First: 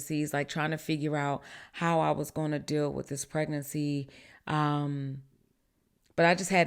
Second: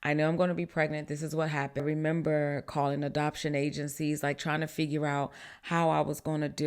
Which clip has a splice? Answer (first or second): second